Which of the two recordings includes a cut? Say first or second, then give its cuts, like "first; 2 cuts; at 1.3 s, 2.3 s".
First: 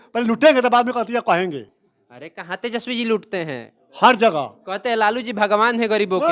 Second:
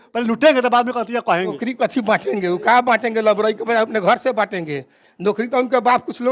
second; 1 cut; at 1.6 s